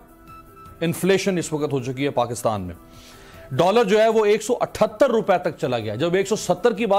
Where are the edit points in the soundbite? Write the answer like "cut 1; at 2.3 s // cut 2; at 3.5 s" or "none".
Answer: none